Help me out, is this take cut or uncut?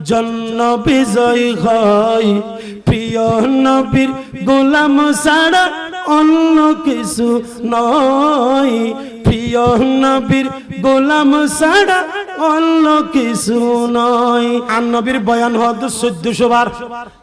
cut